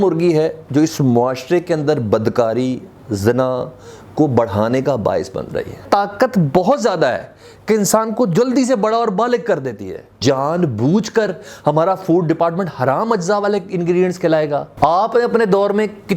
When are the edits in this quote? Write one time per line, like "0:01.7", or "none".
0:05.8
0:10.2
0:14.7

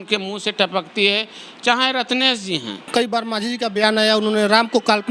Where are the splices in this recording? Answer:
0:02.8

